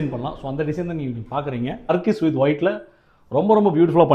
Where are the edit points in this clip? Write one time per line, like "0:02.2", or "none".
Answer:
0:01.9